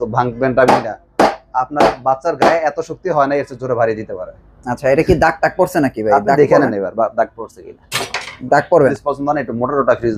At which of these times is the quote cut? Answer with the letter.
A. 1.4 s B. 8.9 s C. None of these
B